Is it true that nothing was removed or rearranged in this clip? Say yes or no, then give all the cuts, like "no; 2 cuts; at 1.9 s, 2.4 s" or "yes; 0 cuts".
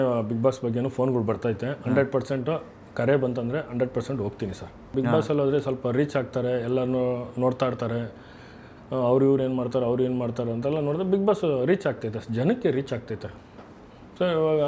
no; 2 cuts; at 4.9 s, 13.3 s